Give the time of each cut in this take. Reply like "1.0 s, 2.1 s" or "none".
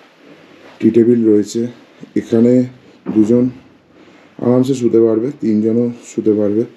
none